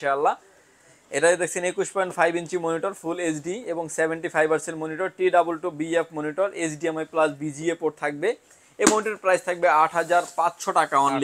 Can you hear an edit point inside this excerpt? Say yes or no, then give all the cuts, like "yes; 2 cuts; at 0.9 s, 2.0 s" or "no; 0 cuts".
no; 0 cuts